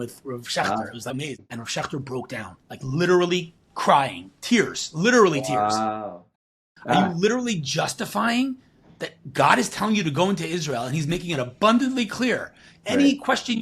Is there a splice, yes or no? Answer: yes